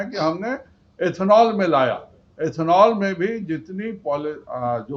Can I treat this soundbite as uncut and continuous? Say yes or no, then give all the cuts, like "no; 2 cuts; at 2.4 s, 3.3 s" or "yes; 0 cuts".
yes; 0 cuts